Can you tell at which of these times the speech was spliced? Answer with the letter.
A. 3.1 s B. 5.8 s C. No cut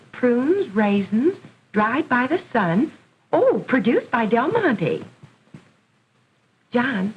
B